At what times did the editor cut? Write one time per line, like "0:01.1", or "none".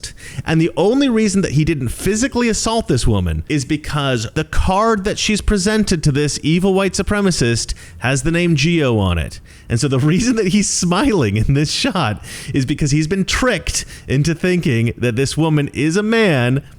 none